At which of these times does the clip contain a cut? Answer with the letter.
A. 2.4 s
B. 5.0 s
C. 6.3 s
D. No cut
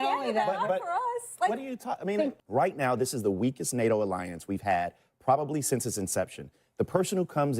A